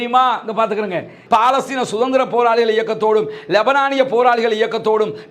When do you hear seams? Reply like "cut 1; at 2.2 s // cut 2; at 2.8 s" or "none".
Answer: cut 1; at 1.2 s